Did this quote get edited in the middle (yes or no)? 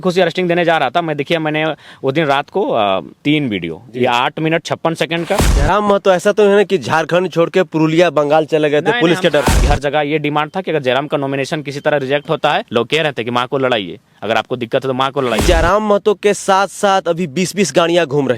yes